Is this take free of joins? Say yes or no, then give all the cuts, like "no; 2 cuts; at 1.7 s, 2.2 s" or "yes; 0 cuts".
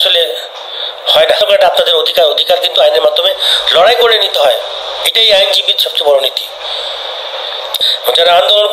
no; 2 cuts; at 1.4 s, 7.7 s